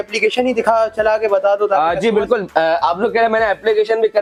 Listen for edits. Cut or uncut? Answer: uncut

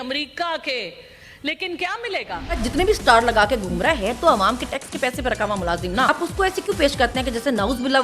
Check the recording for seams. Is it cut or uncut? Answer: cut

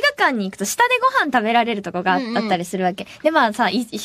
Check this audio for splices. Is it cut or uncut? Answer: uncut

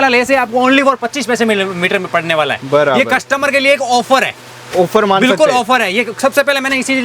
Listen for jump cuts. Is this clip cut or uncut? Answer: uncut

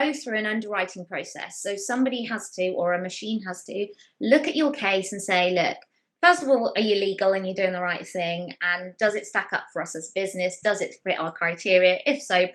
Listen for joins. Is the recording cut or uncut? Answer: uncut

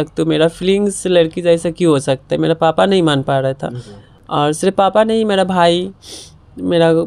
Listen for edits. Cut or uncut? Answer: uncut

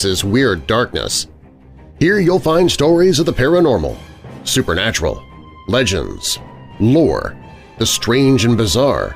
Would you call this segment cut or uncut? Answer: uncut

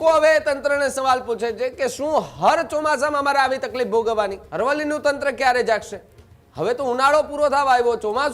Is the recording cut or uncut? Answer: cut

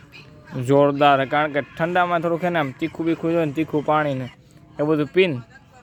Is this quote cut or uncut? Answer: uncut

